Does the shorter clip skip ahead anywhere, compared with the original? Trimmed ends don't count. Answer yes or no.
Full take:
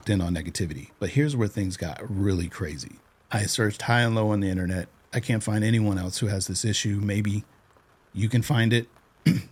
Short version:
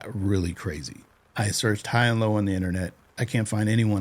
no